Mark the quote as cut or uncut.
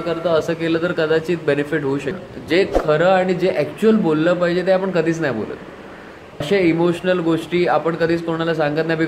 cut